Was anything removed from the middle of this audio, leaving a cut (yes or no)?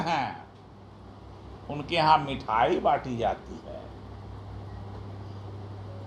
no